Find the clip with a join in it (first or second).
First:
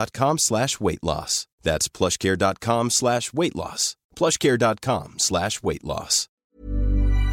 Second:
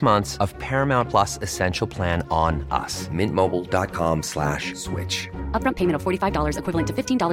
first